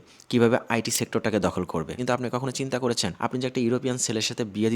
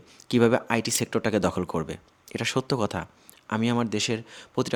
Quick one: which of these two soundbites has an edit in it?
first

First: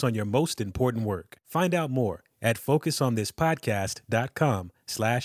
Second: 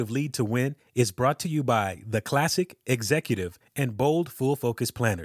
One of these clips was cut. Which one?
first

